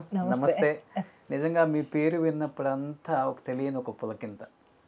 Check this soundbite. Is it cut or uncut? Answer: uncut